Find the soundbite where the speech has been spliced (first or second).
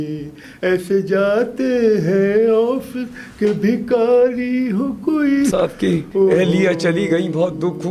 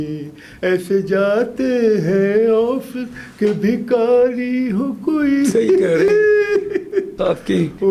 first